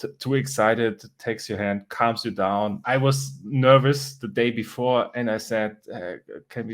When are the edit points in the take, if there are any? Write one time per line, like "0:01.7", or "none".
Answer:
0:02.8